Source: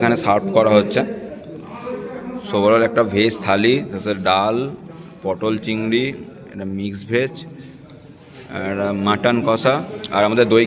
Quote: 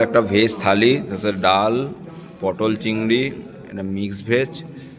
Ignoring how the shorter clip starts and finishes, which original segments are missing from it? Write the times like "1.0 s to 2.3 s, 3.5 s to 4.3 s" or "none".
none